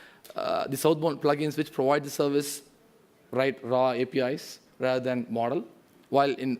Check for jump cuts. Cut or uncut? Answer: cut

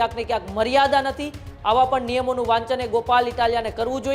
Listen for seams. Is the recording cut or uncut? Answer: uncut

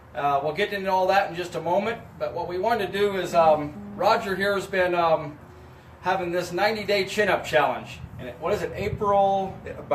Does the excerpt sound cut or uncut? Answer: cut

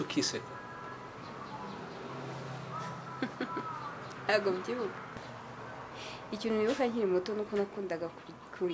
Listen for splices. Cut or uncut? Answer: cut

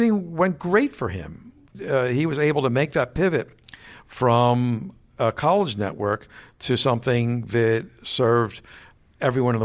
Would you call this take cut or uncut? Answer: uncut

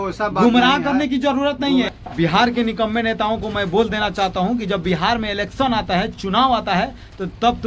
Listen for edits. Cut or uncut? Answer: cut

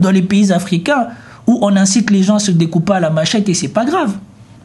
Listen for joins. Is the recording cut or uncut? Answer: uncut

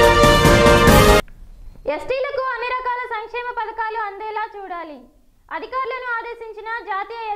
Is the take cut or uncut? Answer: cut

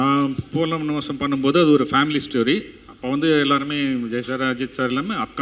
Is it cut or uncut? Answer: uncut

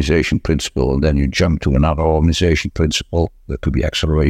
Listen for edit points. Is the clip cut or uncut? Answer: uncut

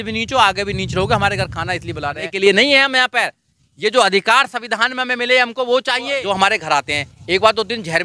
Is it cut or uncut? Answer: cut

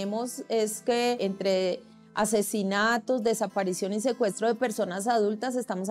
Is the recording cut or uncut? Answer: cut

